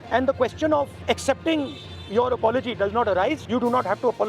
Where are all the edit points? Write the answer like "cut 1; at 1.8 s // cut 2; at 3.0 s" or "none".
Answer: cut 1; at 1.0 s // cut 2; at 3.4 s